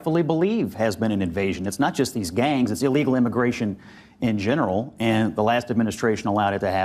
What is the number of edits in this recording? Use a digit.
0